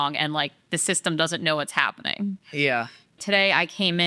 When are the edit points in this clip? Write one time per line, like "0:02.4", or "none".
0:03.1